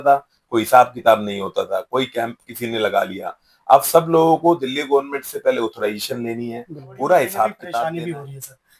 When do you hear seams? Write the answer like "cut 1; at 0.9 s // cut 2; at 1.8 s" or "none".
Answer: cut 1; at 7.7 s